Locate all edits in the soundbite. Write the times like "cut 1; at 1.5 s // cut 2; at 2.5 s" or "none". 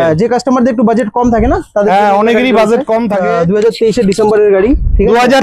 cut 1; at 3.2 s